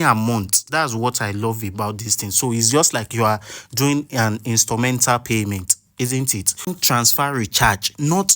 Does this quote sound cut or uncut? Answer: cut